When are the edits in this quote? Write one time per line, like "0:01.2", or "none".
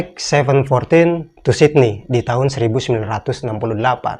none